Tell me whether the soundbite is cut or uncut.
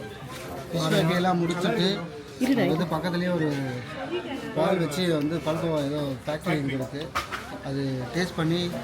uncut